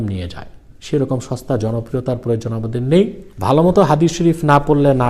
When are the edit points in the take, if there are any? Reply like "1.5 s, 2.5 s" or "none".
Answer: 3.3 s